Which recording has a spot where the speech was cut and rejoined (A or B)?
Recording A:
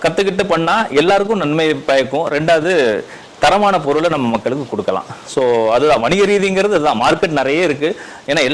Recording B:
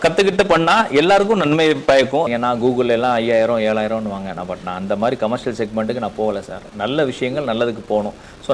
B